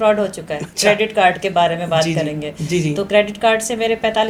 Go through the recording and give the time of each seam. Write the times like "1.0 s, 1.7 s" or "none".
none